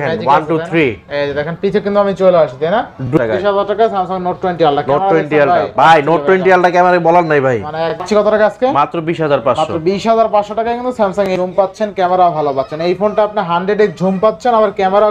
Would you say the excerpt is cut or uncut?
cut